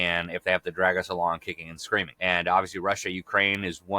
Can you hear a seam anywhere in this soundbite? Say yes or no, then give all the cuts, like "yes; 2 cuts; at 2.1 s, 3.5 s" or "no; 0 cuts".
yes; 1 cut; at 2.1 s